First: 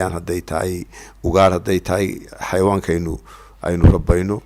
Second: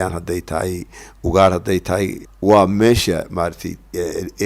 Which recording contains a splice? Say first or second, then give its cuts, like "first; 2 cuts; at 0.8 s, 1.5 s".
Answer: second; 1 cut; at 2.2 s